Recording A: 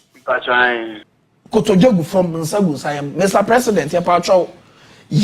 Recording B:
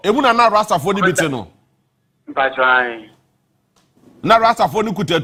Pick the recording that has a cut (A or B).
A